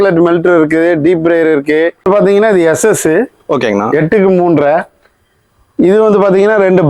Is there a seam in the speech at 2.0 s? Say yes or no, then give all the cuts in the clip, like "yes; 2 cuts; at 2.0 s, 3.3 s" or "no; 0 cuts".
yes; 1 cut; at 2.0 s